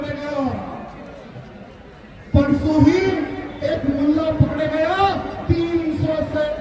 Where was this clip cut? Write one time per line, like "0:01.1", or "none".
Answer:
none